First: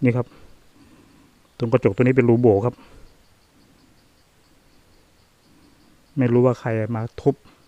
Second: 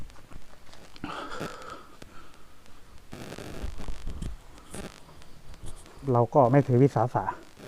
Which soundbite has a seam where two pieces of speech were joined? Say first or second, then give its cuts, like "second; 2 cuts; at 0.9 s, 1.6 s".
second; 1 cut; at 6.0 s